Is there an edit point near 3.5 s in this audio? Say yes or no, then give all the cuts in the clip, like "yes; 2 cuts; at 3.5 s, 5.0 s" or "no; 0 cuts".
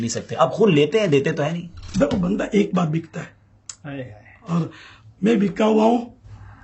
no; 1 cut; at 1.8 s